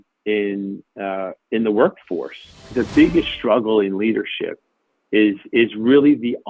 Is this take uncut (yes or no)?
no